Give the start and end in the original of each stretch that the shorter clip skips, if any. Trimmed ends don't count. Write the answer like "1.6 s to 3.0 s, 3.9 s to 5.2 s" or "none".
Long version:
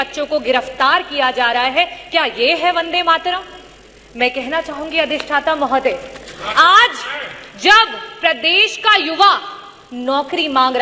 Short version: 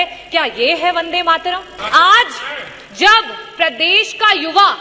3.5 s to 6.4 s